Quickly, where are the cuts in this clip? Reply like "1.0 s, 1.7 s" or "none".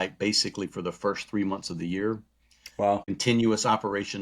2.7 s